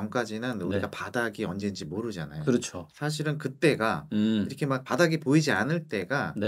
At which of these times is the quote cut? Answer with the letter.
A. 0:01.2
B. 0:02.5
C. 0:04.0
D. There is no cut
D